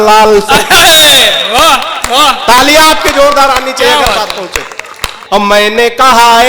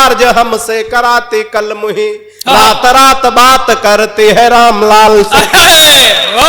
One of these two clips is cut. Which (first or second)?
first